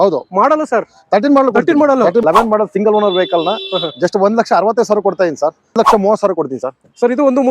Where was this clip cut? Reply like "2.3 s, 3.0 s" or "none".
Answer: 2.2 s, 5.7 s